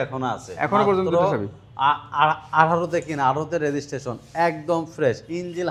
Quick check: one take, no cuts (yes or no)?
yes